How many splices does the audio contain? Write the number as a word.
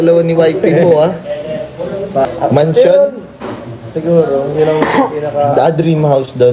one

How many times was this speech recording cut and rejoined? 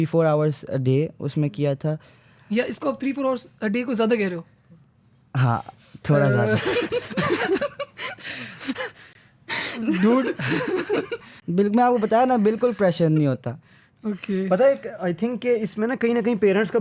zero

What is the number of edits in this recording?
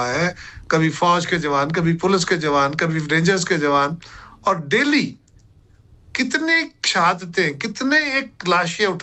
zero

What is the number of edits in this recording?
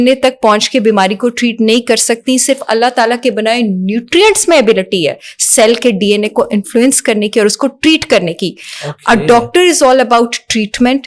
zero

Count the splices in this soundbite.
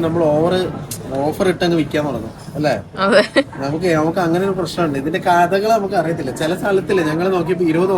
zero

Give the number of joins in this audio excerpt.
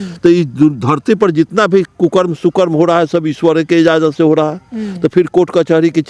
zero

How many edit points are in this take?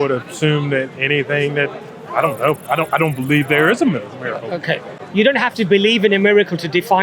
one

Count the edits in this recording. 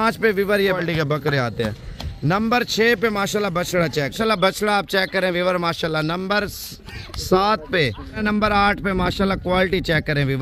three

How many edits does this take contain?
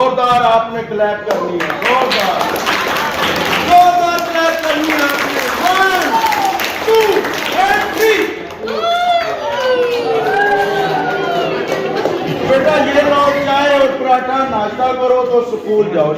one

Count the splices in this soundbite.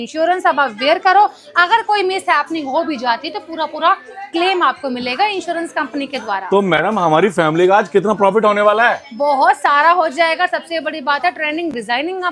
zero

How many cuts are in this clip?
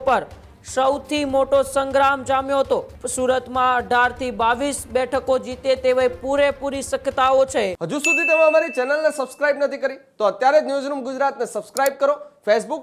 two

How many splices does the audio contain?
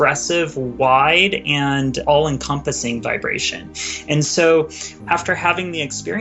two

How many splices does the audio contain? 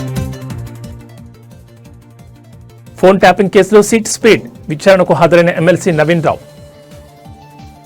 zero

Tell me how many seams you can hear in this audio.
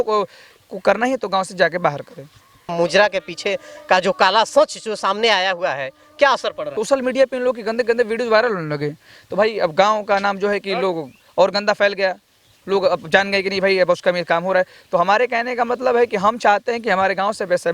two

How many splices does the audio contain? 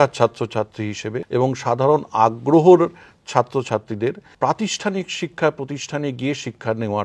two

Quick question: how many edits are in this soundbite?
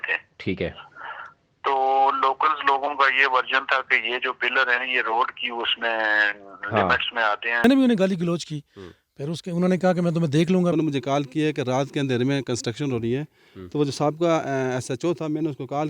two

